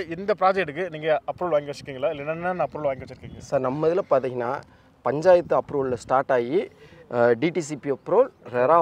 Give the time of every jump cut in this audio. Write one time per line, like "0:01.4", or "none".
none